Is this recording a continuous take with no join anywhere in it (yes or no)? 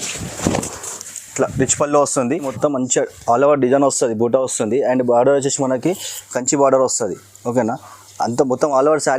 no